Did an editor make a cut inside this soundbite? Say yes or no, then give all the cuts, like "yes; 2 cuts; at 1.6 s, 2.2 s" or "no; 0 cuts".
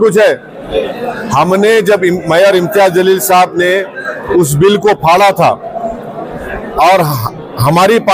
yes; 1 cut; at 1.0 s